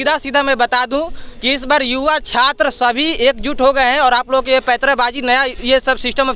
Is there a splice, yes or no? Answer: no